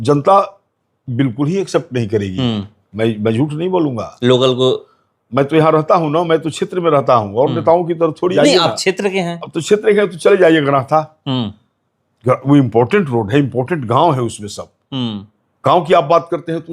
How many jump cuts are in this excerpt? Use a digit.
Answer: 1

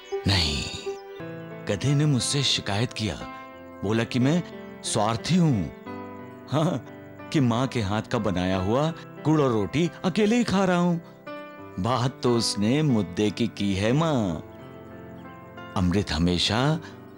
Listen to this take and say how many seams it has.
1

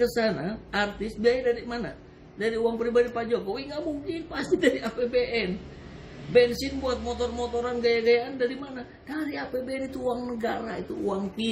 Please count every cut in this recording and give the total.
0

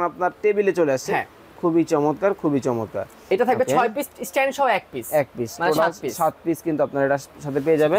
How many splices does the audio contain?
0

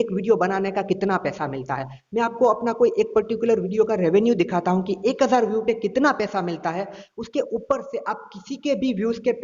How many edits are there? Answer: 0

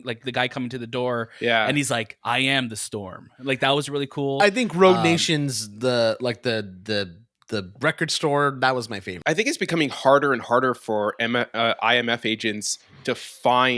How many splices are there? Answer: 1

